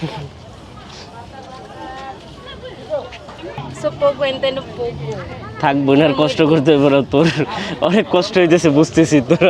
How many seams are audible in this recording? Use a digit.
1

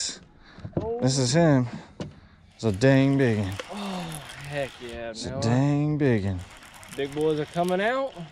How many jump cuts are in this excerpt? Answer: 0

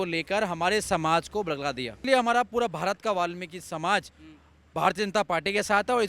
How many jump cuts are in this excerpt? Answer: 1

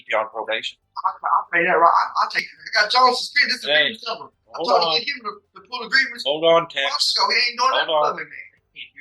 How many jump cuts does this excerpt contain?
1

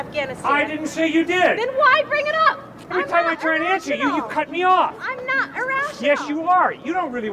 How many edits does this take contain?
1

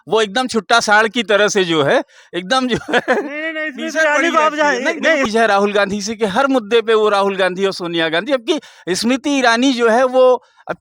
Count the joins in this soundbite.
1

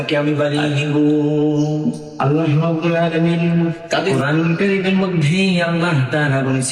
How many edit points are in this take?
1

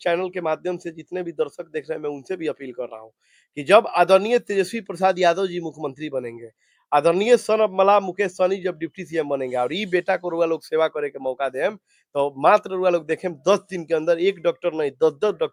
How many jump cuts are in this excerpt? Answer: 0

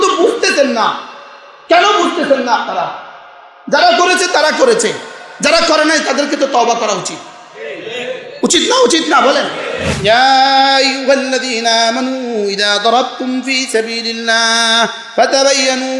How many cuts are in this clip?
1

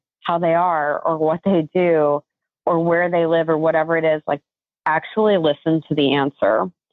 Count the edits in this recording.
0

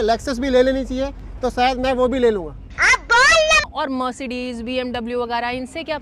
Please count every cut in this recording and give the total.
0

